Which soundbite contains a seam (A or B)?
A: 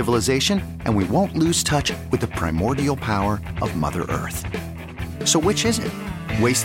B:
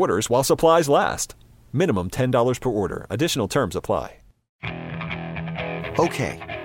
B